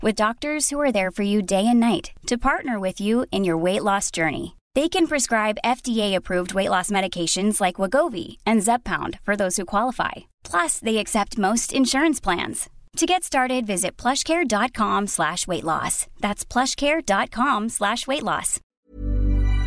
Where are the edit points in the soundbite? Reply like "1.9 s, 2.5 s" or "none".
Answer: 18.6 s